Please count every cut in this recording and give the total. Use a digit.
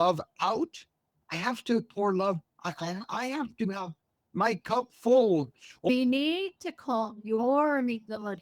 1